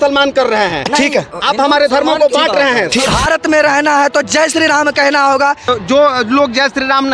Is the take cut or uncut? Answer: cut